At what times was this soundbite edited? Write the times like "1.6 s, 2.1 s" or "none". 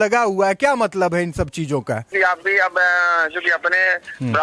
2.1 s